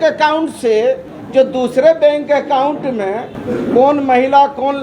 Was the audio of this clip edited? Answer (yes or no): yes